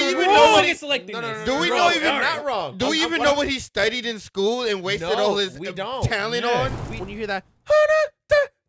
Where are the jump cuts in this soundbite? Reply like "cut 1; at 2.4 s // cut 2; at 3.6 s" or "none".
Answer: cut 1; at 7.0 s